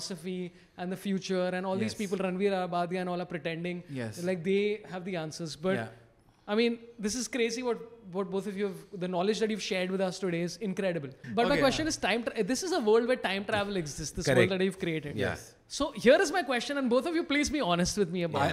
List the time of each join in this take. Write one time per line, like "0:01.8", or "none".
0:11.2